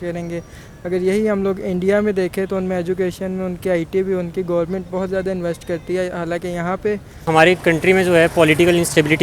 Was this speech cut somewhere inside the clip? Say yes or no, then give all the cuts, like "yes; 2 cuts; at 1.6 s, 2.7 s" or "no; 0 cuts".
yes; 1 cut; at 7.3 s